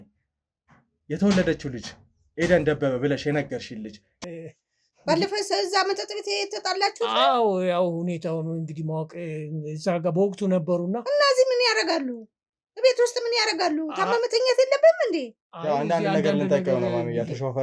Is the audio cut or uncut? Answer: cut